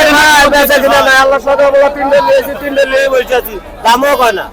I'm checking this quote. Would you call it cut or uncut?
uncut